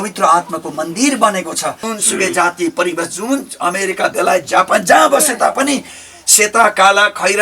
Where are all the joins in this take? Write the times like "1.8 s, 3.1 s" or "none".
1.9 s